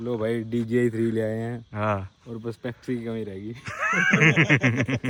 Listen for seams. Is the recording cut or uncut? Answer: uncut